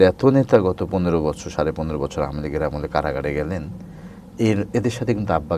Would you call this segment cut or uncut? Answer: uncut